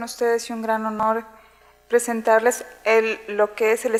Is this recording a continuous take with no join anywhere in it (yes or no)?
yes